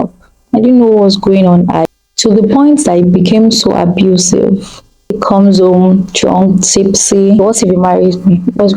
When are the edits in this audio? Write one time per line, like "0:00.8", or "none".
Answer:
0:01.8
0:05.2
0:07.4